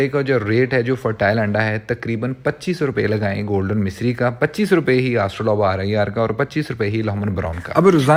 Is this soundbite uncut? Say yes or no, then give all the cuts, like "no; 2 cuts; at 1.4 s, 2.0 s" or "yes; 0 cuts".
yes; 0 cuts